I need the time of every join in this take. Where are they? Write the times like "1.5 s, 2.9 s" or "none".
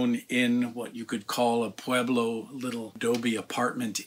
2.9 s